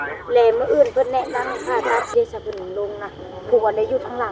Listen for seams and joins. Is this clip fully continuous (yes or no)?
no